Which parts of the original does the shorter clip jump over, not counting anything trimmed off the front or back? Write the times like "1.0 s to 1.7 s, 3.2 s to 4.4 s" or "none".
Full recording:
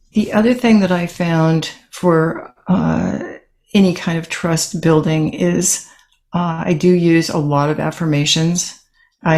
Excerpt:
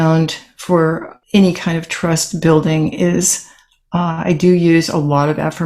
2.5 s to 3.5 s